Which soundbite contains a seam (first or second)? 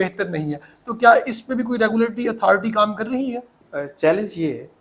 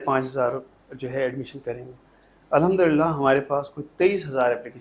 first